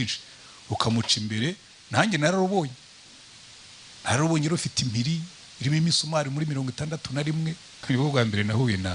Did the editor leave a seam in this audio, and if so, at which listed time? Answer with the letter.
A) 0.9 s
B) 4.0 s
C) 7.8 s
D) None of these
C